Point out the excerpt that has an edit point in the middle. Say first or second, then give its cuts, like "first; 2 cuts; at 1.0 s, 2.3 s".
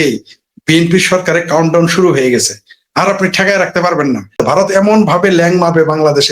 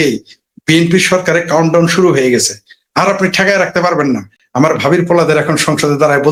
first; 1 cut; at 4.4 s